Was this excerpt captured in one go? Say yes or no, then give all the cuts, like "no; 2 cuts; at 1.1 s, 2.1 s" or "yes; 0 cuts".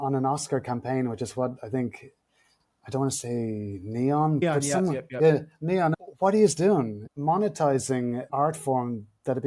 no; 1 cut; at 8.3 s